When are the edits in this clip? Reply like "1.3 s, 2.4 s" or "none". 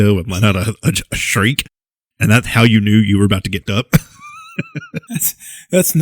3.6 s